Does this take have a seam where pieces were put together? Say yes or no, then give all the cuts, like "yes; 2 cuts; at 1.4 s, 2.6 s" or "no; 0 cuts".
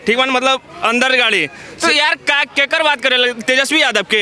no; 0 cuts